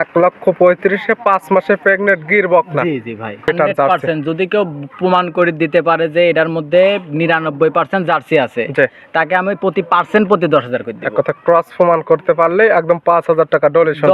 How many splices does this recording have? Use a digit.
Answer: 1